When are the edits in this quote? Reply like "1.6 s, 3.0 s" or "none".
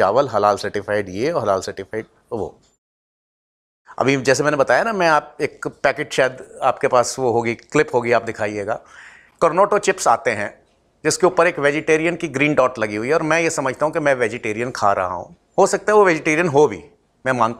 none

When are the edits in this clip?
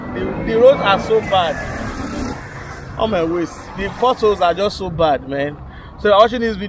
2.8 s

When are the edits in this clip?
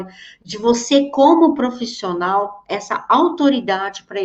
none

